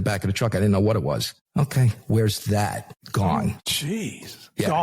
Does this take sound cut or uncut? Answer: cut